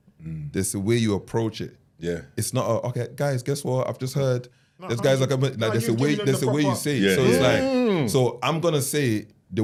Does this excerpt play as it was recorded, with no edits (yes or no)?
yes